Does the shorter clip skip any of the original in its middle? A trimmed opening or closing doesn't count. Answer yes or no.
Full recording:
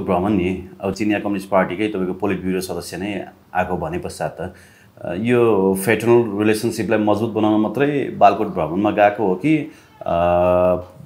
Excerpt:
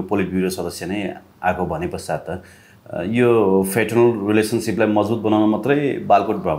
no